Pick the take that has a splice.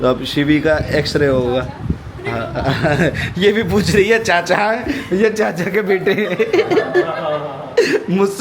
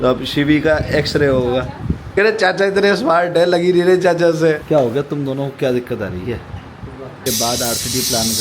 second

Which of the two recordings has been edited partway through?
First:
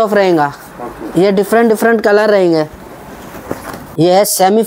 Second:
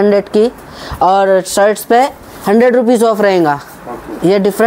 first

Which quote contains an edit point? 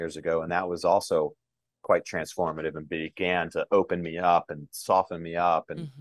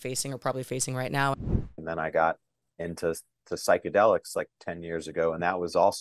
second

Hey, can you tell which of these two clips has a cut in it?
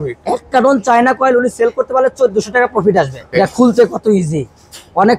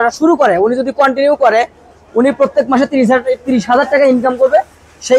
first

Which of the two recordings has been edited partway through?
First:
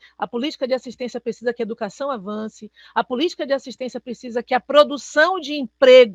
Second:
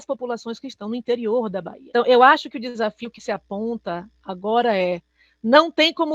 second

